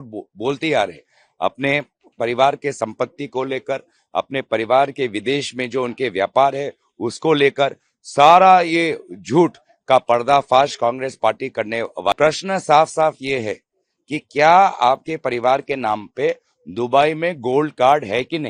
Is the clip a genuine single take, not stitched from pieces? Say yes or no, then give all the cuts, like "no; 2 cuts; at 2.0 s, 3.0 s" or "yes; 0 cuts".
no; 1 cut; at 12.1 s